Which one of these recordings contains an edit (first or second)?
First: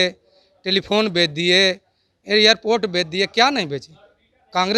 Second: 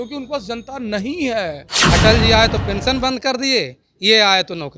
second